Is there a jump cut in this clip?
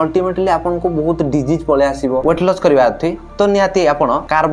yes; 1 cut; at 2.2 s

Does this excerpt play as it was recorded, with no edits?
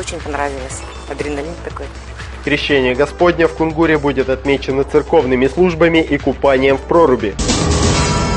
no; 1 cut; at 7.4 s

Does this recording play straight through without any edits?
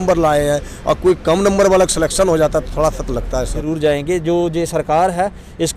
no; 1 cut; at 3.6 s

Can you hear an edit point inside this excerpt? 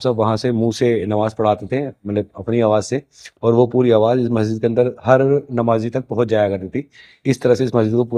no; 0 cuts

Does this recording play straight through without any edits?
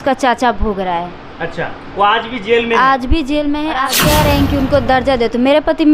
no; 1 cut; at 3.7 s

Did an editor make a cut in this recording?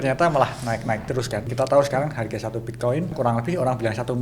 yes; 2 cuts; at 1.5 s, 3.1 s

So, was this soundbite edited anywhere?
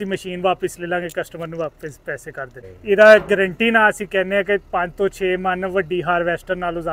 yes; 1 cut; at 2.8 s

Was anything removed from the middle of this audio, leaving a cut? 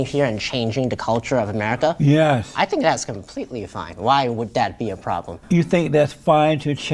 yes; 1 cut; at 5.3 s

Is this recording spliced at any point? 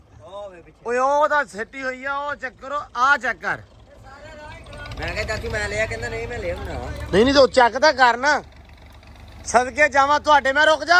no; 0 cuts

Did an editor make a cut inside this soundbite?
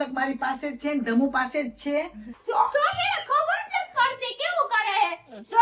yes; 1 cut; at 2.4 s

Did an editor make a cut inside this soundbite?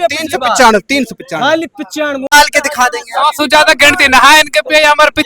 yes; 1 cut; at 2.3 s

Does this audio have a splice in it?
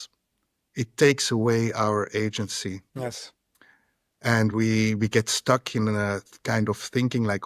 no; 0 cuts

